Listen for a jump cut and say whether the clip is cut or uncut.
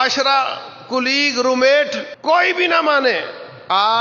cut